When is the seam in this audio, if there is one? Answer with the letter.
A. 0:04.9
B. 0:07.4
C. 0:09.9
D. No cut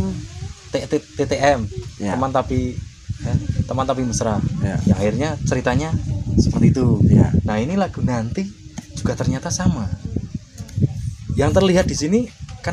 D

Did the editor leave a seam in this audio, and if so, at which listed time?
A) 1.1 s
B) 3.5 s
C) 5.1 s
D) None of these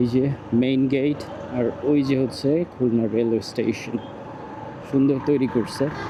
D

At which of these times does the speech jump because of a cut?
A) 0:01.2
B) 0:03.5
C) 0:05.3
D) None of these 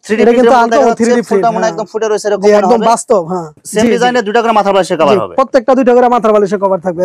D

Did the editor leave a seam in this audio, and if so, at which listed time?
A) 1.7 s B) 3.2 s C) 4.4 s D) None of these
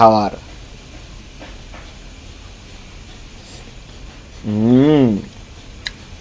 D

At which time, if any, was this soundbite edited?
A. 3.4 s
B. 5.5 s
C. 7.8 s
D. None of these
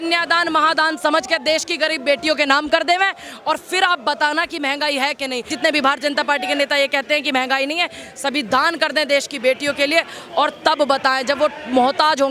B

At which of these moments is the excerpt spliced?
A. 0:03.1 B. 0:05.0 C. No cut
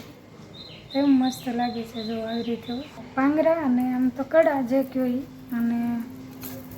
A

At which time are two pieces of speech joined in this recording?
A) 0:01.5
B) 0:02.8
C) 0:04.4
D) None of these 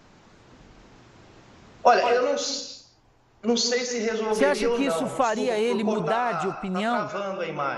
C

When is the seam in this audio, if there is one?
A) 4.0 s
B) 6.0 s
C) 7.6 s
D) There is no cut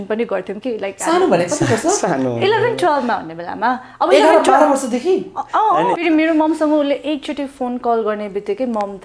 B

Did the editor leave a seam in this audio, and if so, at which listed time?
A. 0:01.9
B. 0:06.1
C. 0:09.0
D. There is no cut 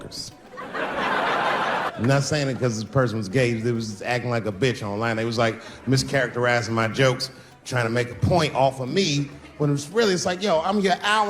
A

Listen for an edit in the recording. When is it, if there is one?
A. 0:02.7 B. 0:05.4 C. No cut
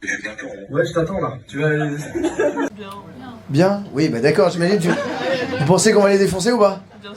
A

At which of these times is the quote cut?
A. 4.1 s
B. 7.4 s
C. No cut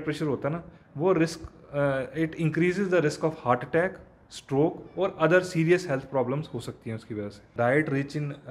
B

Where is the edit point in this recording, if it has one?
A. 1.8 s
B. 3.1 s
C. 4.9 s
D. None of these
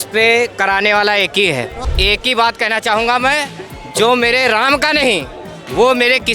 A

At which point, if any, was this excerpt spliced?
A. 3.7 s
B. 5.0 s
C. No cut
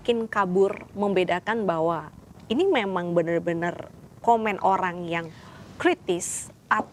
C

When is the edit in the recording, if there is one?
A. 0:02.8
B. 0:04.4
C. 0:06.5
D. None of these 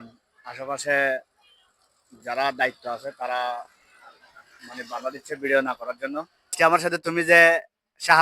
C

